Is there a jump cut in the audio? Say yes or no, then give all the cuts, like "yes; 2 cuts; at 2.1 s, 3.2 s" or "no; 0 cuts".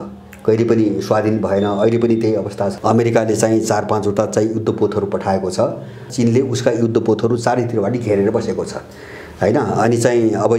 yes; 1 cut; at 2.7 s